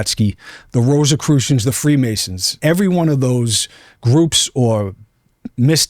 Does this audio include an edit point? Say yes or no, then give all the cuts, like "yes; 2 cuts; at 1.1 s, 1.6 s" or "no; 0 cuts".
yes; 1 cut; at 2.5 s